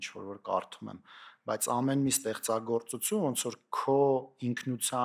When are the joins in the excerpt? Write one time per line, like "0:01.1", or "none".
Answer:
none